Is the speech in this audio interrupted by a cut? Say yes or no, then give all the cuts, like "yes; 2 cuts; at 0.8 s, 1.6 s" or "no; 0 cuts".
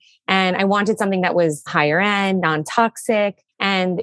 yes; 1 cut; at 1.7 s